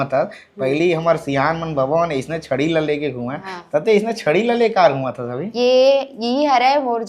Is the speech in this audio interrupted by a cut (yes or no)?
no